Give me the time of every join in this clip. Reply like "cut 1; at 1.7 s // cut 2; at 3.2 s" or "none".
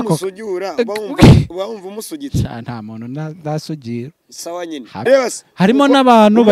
cut 1; at 5.1 s